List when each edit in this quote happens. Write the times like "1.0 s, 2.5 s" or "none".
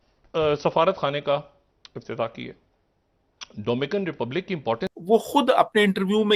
4.9 s